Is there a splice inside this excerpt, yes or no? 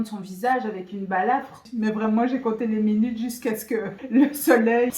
yes